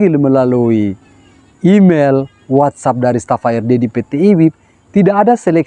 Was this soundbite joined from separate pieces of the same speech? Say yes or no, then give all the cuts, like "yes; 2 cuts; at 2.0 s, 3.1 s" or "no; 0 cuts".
no; 0 cuts